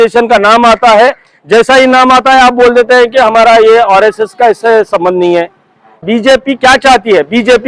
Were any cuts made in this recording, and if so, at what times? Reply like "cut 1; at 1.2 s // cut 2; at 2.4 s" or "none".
cut 1; at 6.0 s